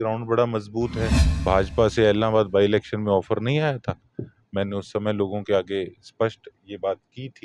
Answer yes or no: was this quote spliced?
yes